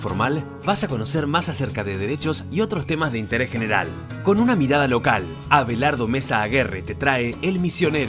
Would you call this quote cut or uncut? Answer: uncut